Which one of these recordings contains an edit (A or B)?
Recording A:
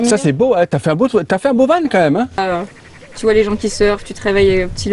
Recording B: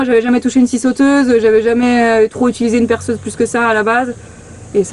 A